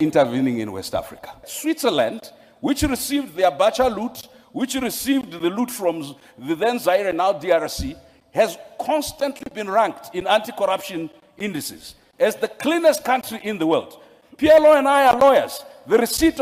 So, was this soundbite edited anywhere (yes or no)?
yes